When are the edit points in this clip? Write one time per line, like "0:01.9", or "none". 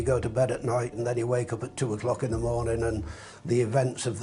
0:00.9